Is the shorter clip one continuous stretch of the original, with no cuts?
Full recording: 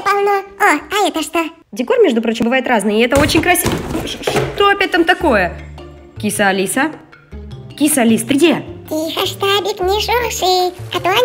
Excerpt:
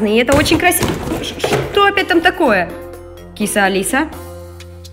yes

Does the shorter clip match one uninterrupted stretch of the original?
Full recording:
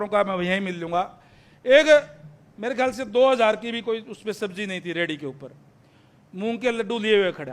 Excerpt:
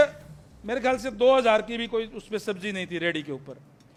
yes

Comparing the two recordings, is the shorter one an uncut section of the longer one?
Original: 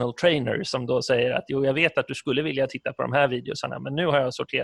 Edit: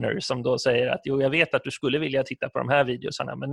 yes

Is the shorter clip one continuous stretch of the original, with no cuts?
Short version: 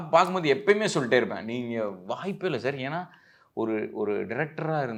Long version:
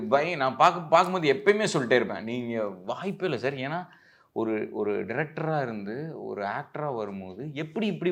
yes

